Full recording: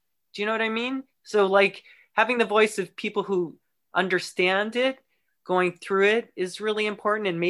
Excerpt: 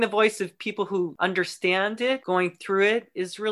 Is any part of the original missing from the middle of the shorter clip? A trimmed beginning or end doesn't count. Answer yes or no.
yes